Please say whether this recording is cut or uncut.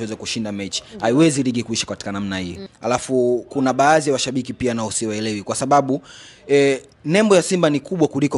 cut